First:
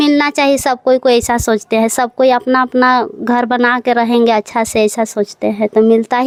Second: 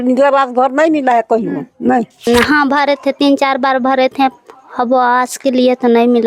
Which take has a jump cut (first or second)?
second